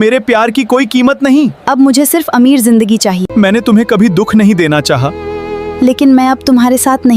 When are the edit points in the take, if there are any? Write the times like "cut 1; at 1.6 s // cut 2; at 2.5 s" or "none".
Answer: cut 1; at 3.2 s